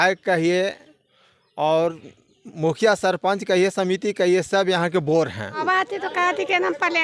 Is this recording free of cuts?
no; 1 cut; at 5.6 s

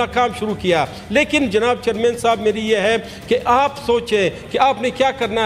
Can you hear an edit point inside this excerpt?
no; 0 cuts

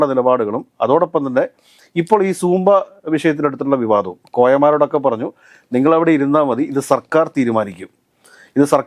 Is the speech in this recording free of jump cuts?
yes; 0 cuts

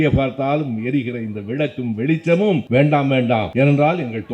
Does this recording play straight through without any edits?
no; 2 cuts; at 2.6 s, 3.5 s

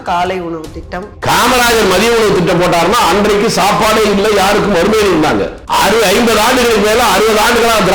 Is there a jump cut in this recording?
yes; 2 cuts; at 1.1 s, 5.6 s

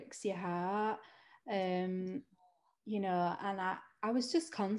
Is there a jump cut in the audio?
no; 0 cuts

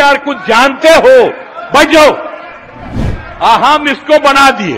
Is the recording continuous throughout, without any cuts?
yes; 0 cuts

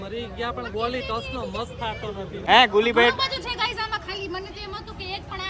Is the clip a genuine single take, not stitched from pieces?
no; 1 cut; at 2.4 s

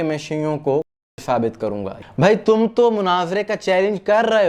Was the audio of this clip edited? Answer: yes; 1 cut; at 1.9 s

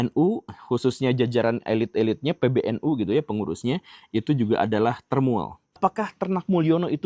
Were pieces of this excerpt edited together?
yes; 1 cut; at 5.8 s

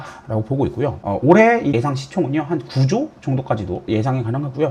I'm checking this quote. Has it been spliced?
yes; 3 cuts; at 1.0 s, 1.8 s, 3.9 s

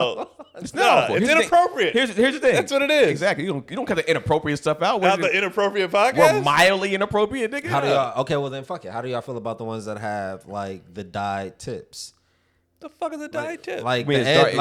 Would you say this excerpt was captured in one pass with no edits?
yes; 0 cuts

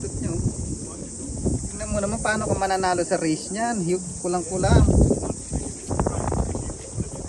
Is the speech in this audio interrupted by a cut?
no; 0 cuts

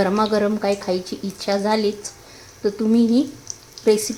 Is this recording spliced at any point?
no; 0 cuts

